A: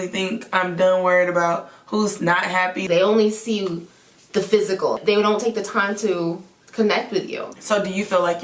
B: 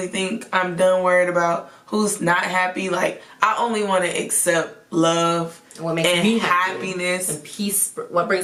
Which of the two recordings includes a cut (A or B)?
A